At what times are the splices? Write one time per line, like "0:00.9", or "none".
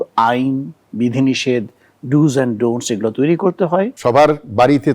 0:03.9